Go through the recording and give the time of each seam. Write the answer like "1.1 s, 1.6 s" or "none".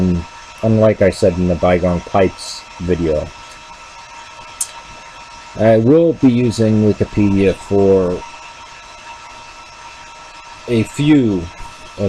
3.5 s